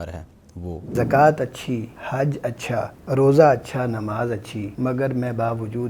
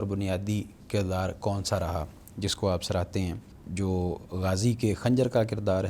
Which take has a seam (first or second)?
first